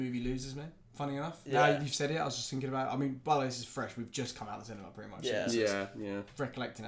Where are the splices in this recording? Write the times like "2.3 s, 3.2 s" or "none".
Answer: none